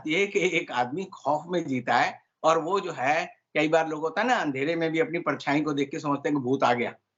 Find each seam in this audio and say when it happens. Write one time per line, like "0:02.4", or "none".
none